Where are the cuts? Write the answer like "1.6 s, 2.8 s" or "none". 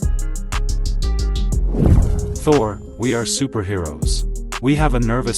2.3 s